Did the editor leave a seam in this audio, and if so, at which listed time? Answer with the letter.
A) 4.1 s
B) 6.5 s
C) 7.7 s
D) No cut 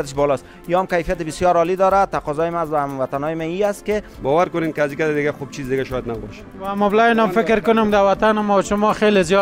A